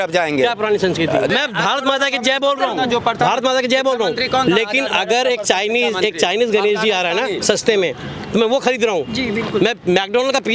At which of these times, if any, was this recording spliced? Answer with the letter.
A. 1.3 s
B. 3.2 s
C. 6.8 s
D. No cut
A